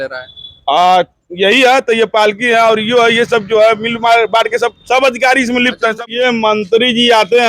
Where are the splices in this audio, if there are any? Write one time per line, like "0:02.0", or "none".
0:06.1